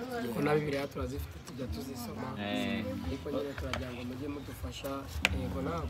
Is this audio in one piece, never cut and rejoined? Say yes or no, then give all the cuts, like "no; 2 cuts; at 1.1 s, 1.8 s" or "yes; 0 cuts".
yes; 0 cuts